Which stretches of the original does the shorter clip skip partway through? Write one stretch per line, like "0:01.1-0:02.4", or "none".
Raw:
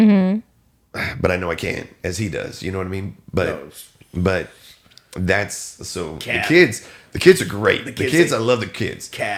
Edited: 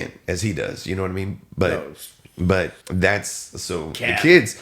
0:04.6-0:05.1